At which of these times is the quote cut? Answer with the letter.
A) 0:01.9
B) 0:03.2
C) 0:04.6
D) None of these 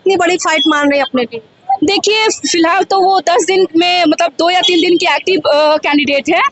D